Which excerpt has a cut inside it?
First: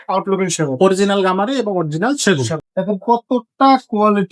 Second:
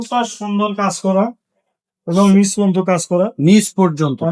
first; 1 cut; at 2.6 s

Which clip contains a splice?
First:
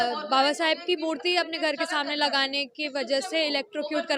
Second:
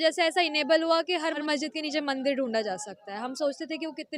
second; 1 cut; at 1.4 s

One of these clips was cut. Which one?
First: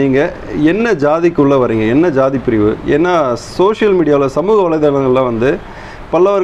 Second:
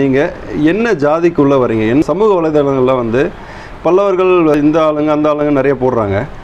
second; 2 cuts; at 2.0 s, 4.5 s

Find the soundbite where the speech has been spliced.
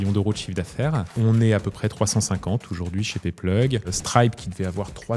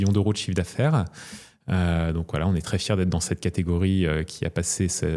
first; 2 cuts; at 1.1 s, 4.0 s

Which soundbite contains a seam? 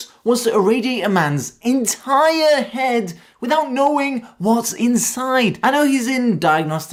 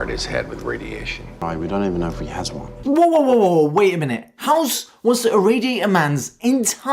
second; 1 cut; at 2.7 s

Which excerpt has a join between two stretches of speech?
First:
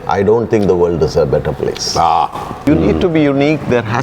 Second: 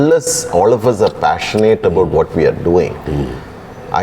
first; 1 cut; at 2.6 s

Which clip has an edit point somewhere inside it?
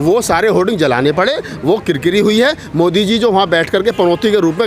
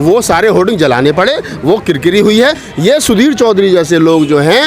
second; 1 cut; at 2.6 s

